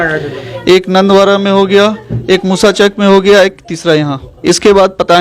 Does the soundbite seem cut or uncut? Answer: cut